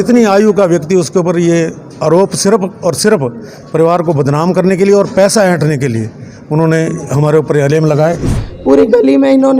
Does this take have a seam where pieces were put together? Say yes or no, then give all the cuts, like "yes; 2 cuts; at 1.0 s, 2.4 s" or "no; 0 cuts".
yes; 1 cut; at 8.2 s